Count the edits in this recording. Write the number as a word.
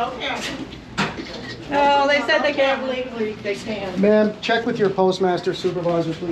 zero